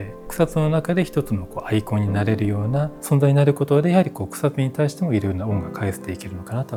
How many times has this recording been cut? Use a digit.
0